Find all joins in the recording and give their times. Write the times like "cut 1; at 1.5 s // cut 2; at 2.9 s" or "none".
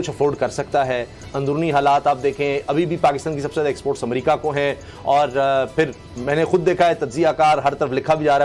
none